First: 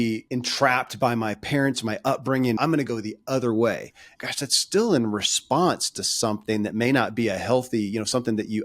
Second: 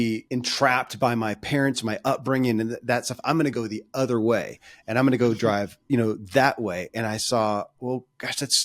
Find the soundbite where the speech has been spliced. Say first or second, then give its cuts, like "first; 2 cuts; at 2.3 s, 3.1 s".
first; 2 cuts; at 2.6 s, 4.1 s